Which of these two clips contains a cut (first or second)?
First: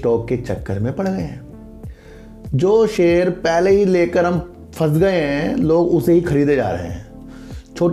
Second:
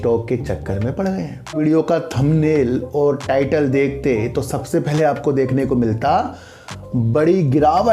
second